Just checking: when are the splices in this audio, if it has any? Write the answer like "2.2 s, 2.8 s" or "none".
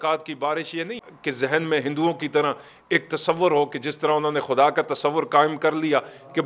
1.0 s